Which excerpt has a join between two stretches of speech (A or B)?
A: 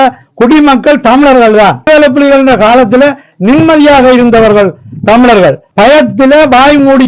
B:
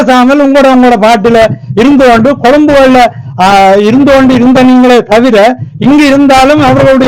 A